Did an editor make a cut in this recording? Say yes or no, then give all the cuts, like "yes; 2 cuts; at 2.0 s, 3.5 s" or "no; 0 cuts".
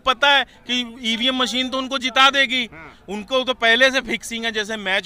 no; 0 cuts